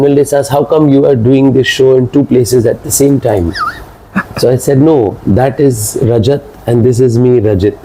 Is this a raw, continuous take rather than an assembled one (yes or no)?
yes